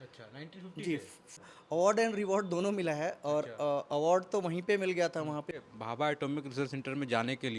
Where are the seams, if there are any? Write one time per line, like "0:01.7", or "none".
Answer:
0:01.5
0:05.5